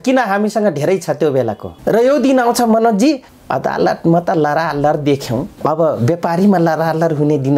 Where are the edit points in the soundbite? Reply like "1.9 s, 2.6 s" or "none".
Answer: 1.7 s, 3.3 s, 5.5 s